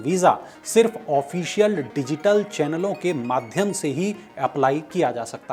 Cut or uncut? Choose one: uncut